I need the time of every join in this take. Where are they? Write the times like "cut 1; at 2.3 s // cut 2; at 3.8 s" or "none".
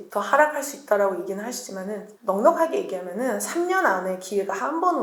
none